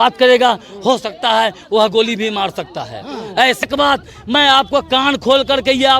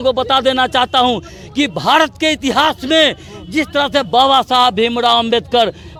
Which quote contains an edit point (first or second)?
first